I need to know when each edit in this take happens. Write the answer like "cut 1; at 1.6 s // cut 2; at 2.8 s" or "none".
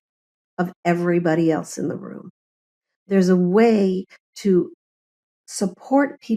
none